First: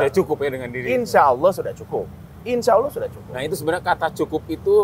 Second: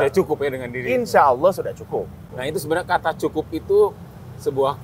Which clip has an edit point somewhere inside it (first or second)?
second